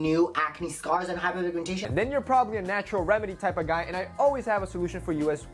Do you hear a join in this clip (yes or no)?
yes